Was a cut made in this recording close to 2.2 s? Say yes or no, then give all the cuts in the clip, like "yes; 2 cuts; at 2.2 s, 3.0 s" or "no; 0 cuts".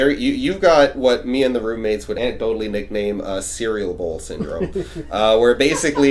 yes; 1 cut; at 2.2 s